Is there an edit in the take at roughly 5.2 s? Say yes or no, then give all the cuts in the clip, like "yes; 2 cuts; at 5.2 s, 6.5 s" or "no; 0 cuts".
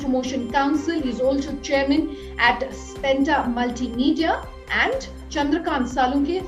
yes; 1 cut; at 5.2 s